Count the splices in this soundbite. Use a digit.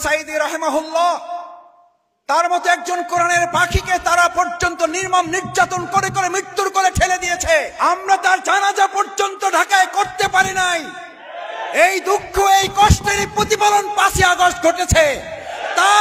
1